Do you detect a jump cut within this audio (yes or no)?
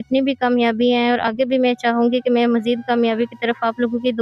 no